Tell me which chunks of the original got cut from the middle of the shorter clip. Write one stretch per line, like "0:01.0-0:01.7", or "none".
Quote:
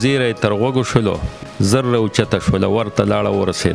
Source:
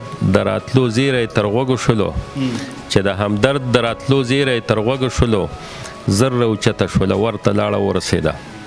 0:02.2-0:05.8